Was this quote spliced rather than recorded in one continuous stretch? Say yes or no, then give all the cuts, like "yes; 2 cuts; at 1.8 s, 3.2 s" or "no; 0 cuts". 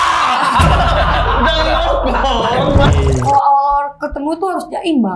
yes; 1 cut; at 2.9 s